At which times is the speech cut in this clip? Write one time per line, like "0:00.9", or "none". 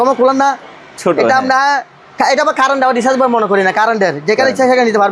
none